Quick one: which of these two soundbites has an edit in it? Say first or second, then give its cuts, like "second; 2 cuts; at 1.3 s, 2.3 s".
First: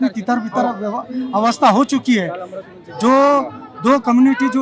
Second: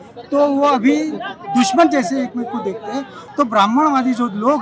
second; 1 cut; at 3.2 s